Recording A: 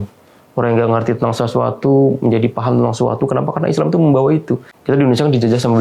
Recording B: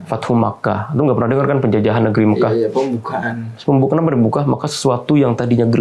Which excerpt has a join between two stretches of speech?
A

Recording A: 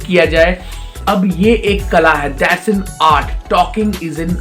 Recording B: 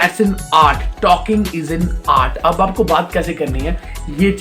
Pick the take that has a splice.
A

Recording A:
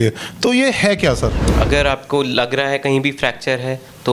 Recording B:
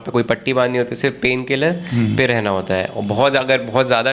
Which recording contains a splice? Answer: A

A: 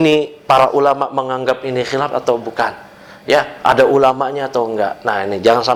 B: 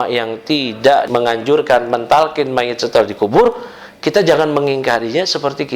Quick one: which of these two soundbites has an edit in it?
B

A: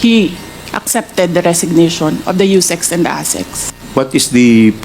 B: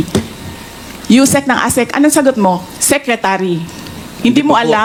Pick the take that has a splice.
A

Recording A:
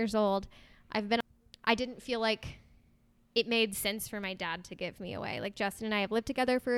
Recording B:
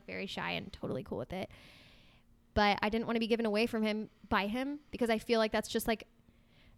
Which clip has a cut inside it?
A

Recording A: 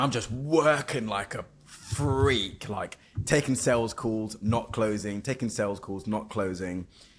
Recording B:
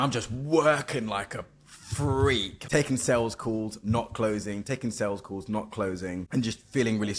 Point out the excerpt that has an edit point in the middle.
B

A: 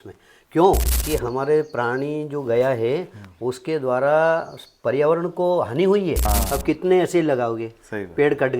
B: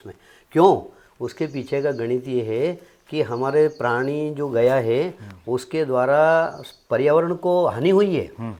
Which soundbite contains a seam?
A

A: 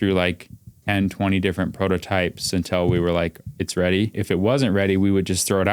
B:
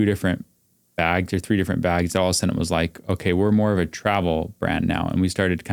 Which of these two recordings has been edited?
A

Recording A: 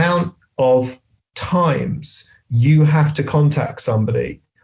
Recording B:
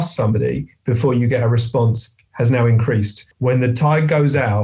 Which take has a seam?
B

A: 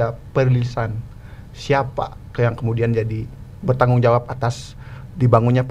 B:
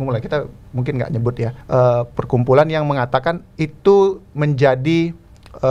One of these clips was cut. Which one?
B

